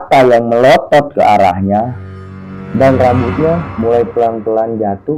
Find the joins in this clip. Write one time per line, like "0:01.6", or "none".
none